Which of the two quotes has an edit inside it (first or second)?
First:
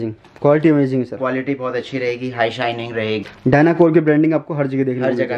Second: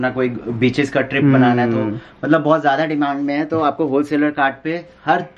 first